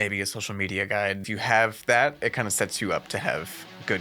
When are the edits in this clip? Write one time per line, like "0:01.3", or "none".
0:01.3